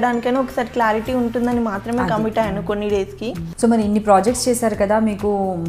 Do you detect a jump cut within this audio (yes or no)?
yes